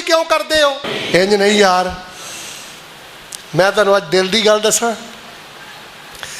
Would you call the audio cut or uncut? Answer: cut